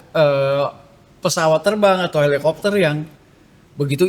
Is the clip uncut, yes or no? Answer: yes